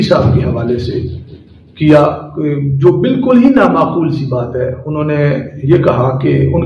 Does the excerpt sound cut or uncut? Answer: uncut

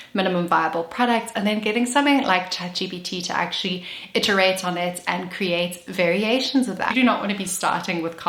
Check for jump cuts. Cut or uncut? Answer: cut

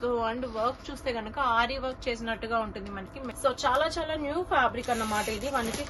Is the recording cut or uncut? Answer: cut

